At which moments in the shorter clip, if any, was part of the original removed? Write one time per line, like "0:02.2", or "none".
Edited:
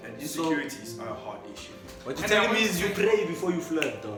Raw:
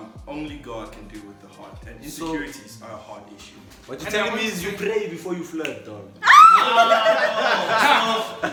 none